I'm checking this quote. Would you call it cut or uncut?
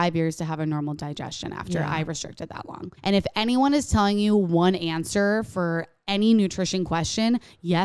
cut